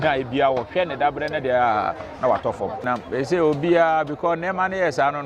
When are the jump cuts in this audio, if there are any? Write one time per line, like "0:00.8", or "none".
0:02.8